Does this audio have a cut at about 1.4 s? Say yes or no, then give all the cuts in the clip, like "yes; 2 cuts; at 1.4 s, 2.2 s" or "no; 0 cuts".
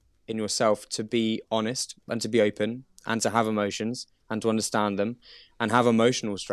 no; 0 cuts